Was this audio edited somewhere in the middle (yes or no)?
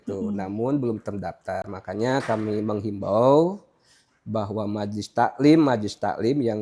no